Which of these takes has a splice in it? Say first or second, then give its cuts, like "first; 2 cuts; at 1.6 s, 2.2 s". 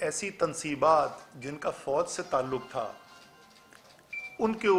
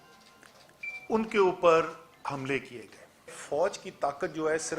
second; 1 cut; at 3.4 s